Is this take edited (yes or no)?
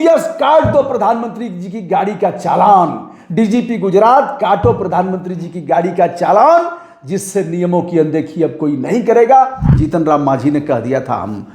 yes